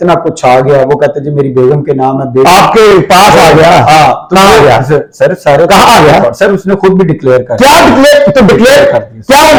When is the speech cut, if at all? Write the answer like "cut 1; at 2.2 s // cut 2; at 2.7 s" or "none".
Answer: none

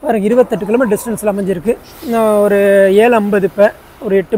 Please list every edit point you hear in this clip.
none

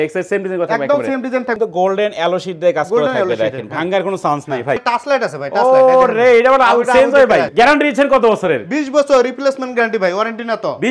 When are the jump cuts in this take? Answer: cut 1; at 1.5 s // cut 2; at 4.8 s // cut 3; at 7.5 s

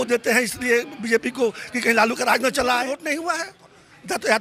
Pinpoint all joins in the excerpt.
cut 1; at 3.1 s

